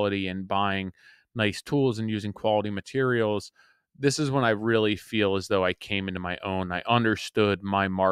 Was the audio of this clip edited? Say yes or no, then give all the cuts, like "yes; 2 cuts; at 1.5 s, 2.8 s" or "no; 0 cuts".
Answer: no; 0 cuts